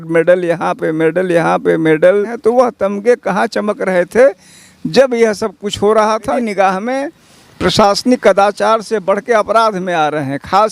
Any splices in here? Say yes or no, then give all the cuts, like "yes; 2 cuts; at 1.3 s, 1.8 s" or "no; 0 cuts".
yes; 2 cuts; at 2.4 s, 6.4 s